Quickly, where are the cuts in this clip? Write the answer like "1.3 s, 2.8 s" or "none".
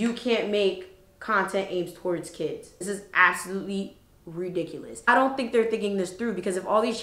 2.8 s, 5.1 s